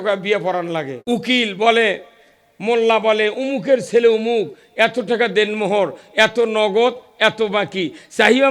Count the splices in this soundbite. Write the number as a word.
one